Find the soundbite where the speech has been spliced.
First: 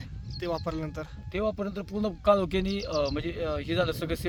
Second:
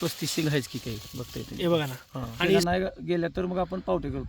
second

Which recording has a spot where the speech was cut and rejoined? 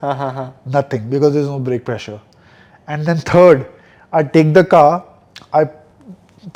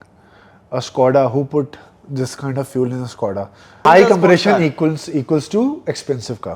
second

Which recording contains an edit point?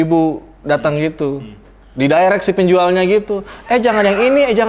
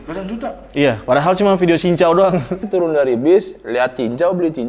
second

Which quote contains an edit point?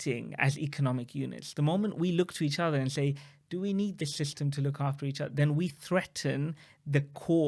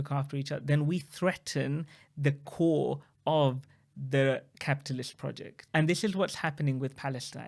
second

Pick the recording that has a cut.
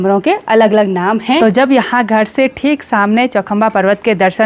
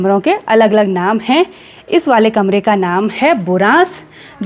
first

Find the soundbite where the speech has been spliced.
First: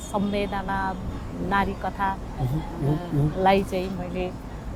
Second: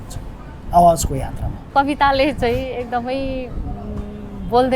second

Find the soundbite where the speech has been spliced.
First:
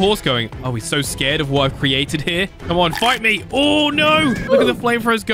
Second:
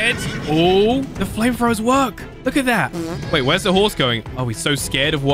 first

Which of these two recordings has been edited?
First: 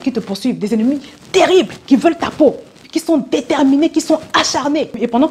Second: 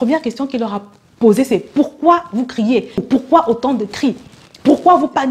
first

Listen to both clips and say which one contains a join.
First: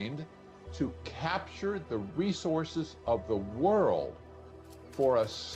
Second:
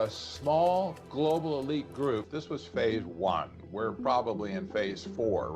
second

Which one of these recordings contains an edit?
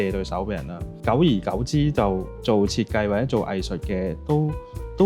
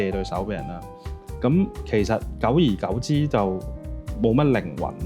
first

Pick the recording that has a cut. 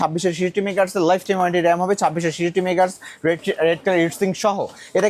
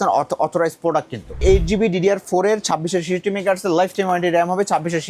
second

